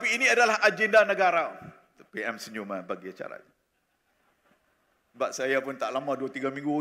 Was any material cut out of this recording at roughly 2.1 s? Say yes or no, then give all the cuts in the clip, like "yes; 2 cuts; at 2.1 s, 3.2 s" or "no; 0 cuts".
no; 0 cuts